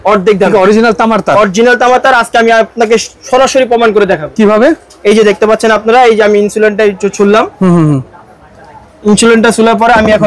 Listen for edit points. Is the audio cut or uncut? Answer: uncut